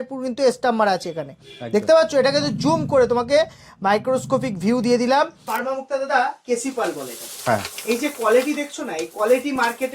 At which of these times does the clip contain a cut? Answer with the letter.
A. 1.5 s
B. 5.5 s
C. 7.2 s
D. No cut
B